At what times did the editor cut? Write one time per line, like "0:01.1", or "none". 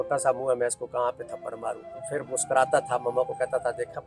0:01.9